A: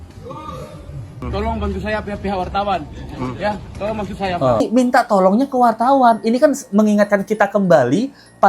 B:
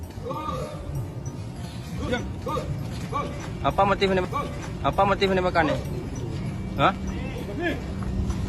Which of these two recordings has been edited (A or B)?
A